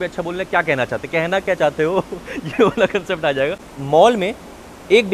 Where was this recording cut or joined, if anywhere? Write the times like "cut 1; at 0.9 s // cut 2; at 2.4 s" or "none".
cut 1; at 3.7 s